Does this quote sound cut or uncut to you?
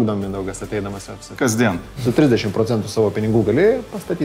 cut